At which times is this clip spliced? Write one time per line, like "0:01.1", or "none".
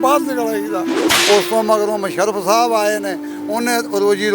0:01.1